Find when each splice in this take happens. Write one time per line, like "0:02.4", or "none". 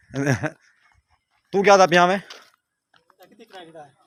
none